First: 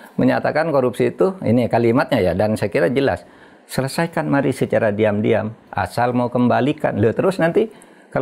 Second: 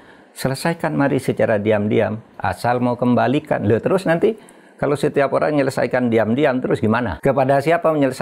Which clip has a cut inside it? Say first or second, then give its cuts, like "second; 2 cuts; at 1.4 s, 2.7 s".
second; 1 cut; at 7.1 s